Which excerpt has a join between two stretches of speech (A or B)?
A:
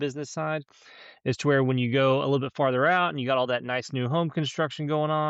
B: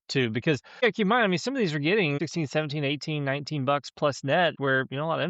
B